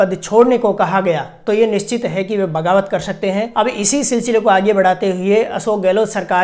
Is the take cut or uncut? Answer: cut